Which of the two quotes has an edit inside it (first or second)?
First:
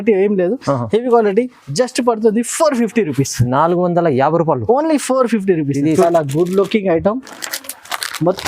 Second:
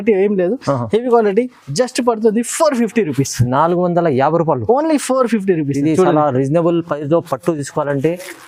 first